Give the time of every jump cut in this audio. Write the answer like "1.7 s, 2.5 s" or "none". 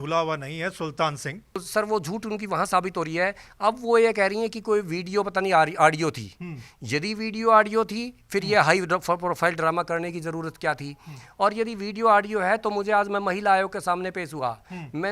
1.6 s